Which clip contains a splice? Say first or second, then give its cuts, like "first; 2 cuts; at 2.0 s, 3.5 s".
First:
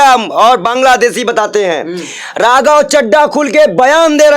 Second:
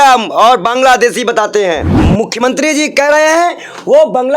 second; 1 cut; at 1.9 s